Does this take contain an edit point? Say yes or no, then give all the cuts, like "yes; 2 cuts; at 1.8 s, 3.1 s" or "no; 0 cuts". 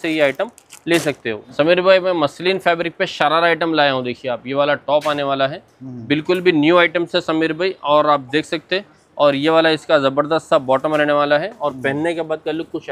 no; 0 cuts